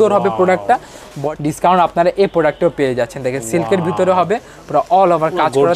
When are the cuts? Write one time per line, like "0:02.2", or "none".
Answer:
0:01.1